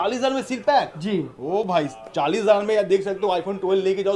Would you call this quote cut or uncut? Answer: uncut